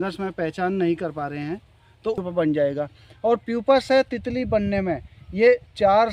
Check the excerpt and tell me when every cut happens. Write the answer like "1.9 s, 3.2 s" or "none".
2.2 s